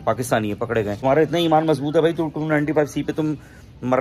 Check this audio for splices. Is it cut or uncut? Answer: cut